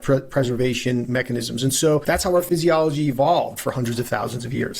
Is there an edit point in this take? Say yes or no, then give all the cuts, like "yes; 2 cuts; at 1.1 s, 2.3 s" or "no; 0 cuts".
yes; 1 cut; at 2.0 s